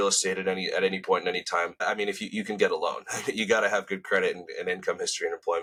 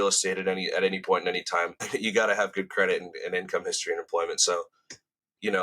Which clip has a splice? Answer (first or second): second